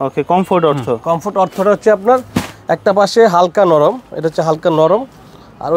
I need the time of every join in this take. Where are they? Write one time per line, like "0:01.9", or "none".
none